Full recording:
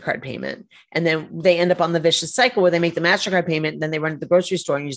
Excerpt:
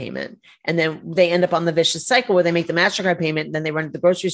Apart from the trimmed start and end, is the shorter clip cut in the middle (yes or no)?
no